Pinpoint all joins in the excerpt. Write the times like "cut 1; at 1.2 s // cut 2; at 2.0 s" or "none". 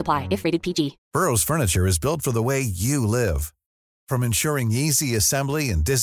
cut 1; at 1.0 s